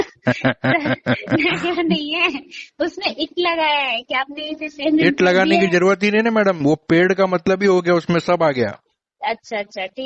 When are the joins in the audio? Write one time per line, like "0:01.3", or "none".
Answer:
none

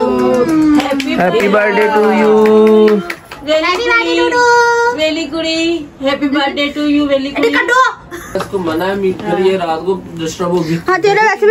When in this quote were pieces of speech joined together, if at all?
0:02.9
0:08.4

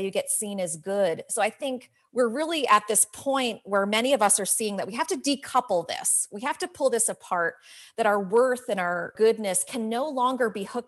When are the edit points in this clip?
0:09.1

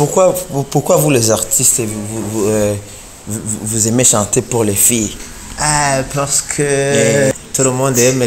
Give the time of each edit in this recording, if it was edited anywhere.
0:07.3

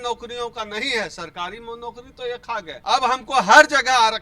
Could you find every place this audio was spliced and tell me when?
0:02.7

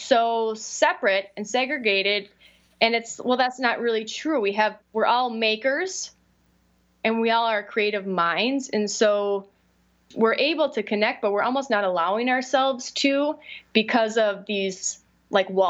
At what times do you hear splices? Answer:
0:10.1

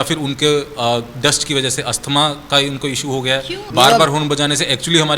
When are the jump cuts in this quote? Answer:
0:03.7

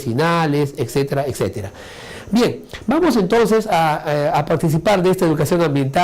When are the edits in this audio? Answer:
0:02.6

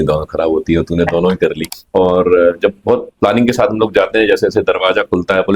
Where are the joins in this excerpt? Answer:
0:01.6

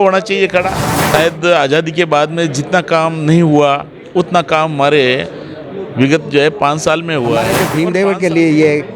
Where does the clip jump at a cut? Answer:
0:00.9
0:07.7

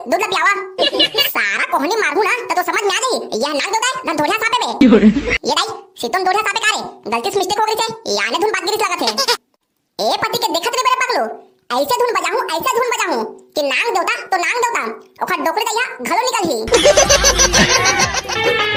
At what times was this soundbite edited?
none

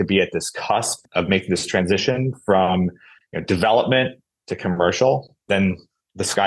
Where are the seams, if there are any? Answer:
none

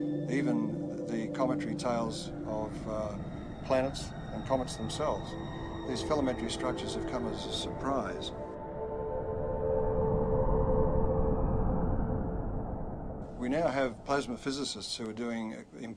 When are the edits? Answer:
none

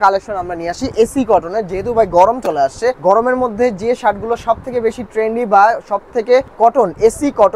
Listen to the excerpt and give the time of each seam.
0:03.0
0:06.5

